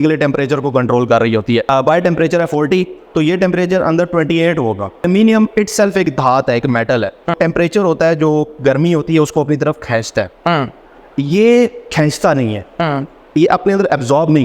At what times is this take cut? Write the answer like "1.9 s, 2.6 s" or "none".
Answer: 1.6 s, 5.0 s, 7.3 s

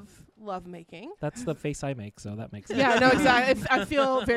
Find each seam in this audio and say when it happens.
1.1 s

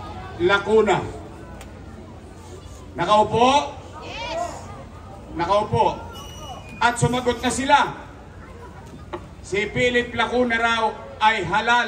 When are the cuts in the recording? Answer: none

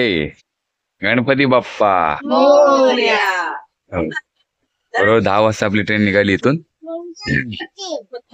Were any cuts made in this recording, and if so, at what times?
none

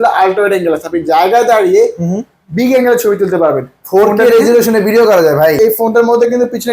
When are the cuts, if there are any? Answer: 5.6 s

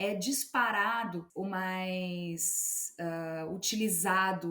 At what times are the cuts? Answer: 1.3 s

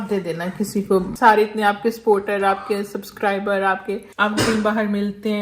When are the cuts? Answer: 1.1 s, 4.1 s

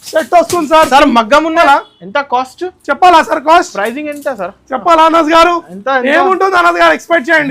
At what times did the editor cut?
1.6 s

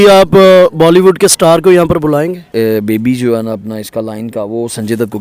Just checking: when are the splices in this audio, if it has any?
2.4 s

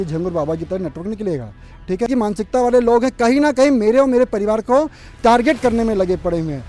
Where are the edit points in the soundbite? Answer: 2.1 s

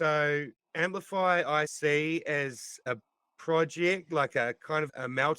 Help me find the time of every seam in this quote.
1.7 s

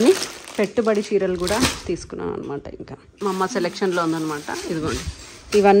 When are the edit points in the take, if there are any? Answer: 3.1 s

